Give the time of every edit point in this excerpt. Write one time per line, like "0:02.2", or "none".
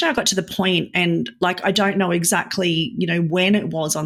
none